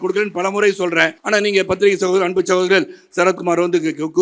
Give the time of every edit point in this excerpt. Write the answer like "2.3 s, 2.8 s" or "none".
1.2 s